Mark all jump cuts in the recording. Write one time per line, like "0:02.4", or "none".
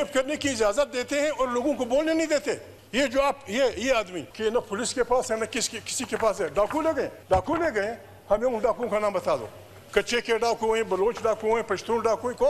0:02.8
0:04.2
0:07.2